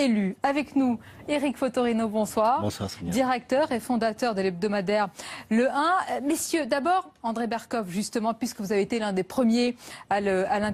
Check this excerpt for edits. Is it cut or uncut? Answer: uncut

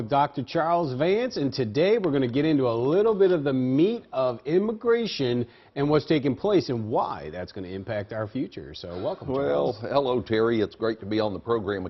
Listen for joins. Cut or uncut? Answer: cut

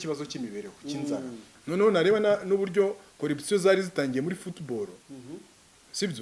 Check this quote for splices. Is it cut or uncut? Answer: cut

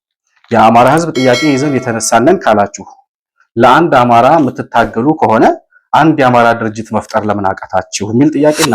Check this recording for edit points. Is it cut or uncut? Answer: uncut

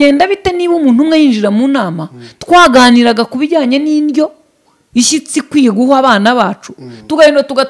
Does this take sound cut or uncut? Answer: uncut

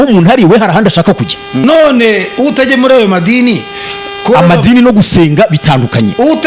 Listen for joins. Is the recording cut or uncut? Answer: cut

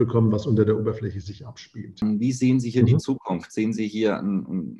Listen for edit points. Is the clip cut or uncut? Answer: cut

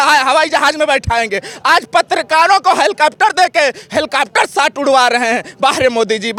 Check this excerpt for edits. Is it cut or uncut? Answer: uncut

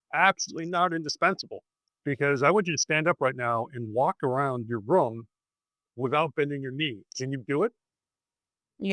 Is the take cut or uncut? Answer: uncut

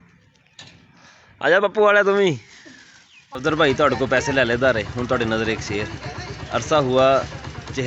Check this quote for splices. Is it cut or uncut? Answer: cut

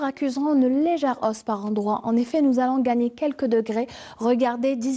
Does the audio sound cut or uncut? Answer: cut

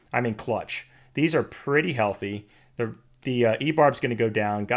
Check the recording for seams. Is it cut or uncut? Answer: uncut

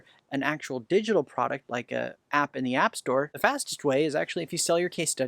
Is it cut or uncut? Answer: cut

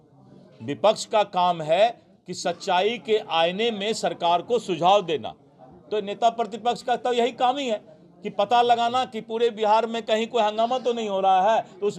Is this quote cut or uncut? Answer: uncut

